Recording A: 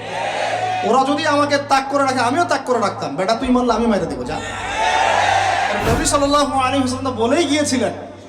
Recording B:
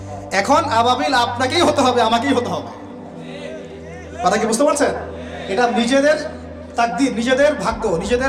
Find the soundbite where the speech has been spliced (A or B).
A